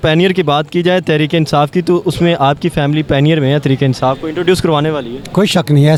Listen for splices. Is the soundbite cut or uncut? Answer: uncut